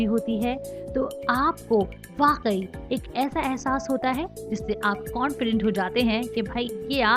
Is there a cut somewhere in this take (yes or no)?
no